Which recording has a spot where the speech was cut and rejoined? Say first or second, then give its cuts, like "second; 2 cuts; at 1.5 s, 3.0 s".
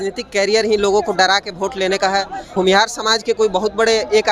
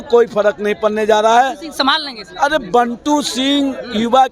first; 1 cut; at 2.4 s